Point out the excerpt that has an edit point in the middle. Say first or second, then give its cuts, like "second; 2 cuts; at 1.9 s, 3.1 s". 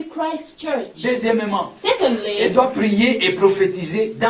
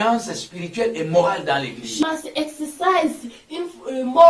second; 1 cut; at 2.0 s